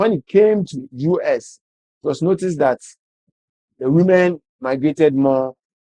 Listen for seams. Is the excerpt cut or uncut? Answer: uncut